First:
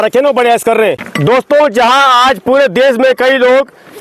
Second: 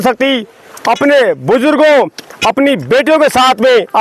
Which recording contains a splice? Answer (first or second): first